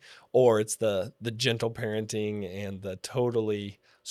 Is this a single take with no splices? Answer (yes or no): yes